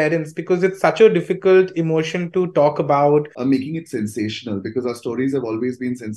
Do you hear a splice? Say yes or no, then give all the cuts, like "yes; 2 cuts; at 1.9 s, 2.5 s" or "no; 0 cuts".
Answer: yes; 1 cut; at 3.3 s